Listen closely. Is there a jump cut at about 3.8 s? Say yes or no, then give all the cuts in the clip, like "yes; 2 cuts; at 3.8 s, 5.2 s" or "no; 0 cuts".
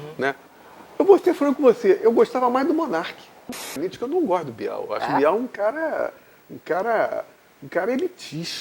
yes; 1 cut; at 3.8 s